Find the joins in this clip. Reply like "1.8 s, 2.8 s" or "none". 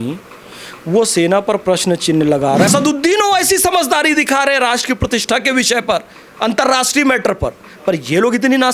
2.7 s